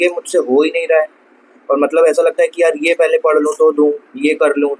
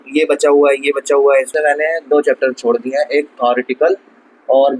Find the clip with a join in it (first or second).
second